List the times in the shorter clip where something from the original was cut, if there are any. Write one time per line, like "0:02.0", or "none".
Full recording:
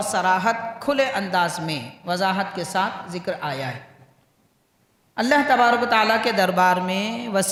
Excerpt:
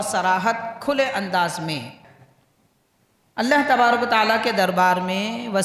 0:02.0